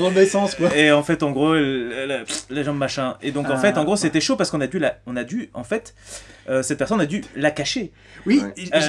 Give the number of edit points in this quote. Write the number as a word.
zero